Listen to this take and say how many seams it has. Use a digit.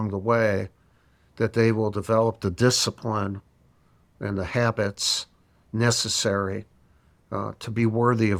0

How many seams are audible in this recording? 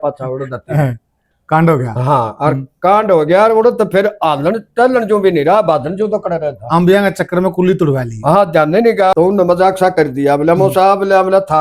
1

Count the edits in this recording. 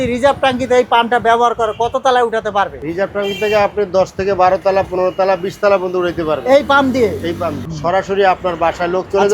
2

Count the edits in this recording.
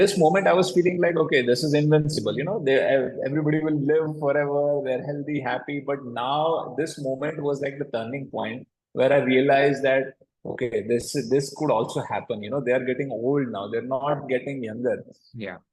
0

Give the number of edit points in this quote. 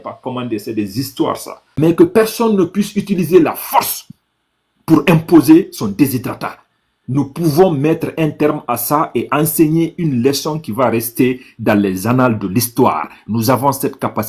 1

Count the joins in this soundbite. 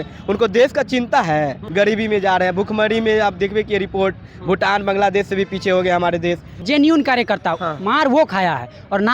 2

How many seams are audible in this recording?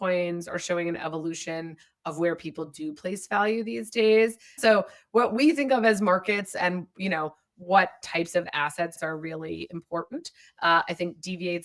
2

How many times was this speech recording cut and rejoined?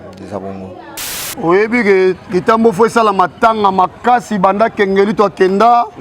1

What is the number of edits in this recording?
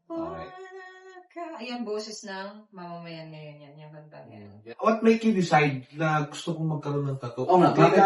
1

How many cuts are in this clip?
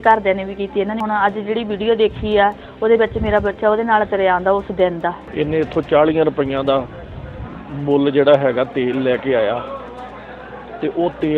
2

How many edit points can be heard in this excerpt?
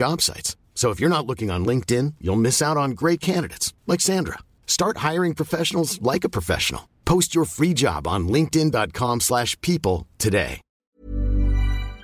1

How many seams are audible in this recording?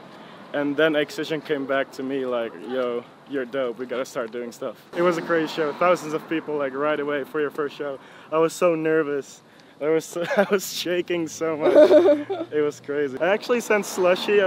2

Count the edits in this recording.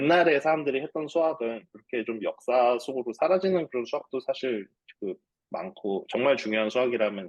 0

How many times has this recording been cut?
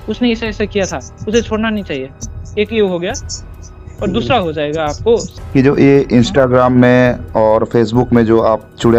1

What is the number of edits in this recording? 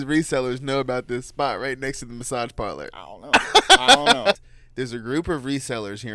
1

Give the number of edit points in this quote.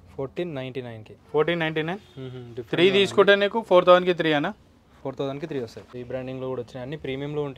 1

